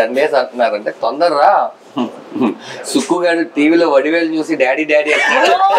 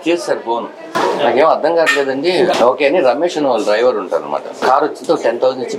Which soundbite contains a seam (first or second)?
second